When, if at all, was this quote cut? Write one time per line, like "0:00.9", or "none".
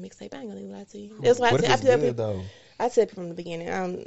none